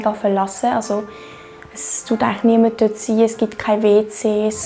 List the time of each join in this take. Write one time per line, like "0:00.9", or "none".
none

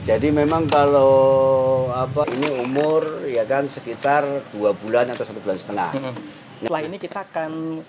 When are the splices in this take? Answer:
0:02.2
0:06.7

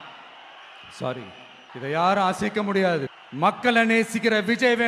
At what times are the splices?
none

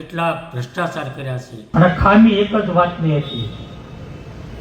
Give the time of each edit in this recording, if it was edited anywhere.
0:01.6

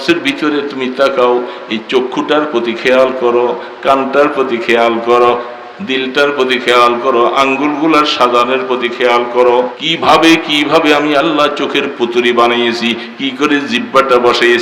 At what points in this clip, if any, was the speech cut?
0:09.8

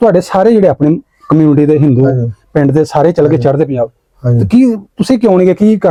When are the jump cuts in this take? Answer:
none

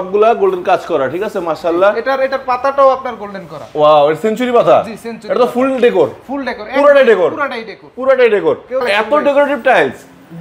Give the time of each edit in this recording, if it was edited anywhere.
0:08.8

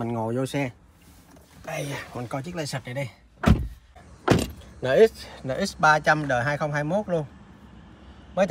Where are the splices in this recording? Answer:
0:04.1

